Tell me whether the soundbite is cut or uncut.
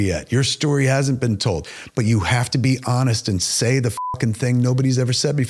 cut